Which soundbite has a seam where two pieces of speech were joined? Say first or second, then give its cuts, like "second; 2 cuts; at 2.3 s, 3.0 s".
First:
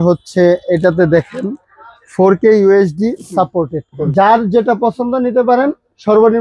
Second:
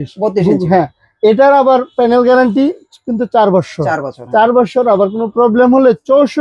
first; 1 cut; at 4.0 s